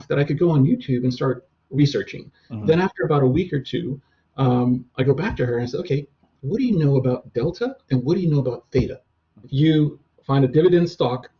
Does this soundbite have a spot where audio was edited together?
yes; 1 cut; at 9.7 s

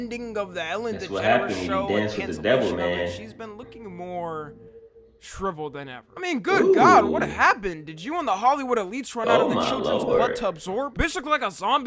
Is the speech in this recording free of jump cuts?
yes; 0 cuts

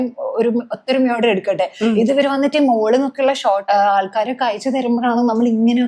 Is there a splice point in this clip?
yes; 1 cut; at 3.6 s

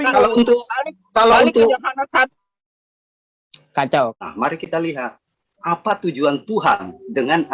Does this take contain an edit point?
yes; 1 cut; at 4.1 s

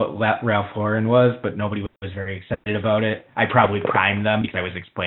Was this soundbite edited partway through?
no; 0 cuts

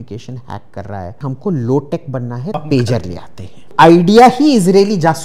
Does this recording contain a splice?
yes; 3 cuts; at 1.2 s, 2.5 s, 3.7 s

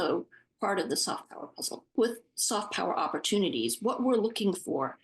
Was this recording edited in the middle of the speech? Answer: yes; 1 cut; at 1.9 s

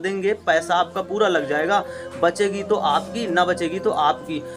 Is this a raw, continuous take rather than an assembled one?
yes; 0 cuts

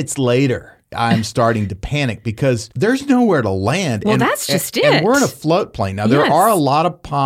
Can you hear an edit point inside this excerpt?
yes; 1 cut; at 0.9 s

